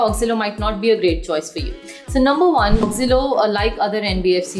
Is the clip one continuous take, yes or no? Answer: no